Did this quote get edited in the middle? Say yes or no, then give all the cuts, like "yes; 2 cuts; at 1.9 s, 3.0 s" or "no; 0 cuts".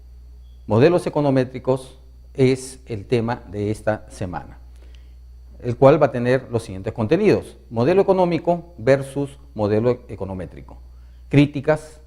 yes; 1 cut; at 10.8 s